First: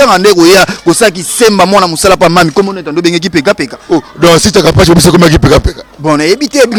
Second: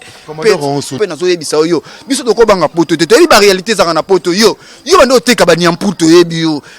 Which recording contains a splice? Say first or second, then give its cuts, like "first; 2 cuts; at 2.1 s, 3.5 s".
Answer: second; 1 cut; at 1.0 s